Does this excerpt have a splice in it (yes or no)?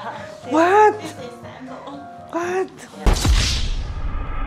no